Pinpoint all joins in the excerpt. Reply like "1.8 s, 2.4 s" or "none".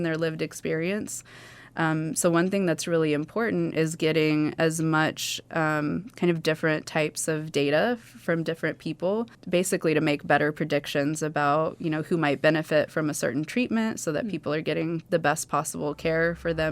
9.4 s